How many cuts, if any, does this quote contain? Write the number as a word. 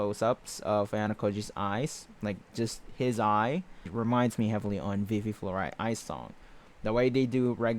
one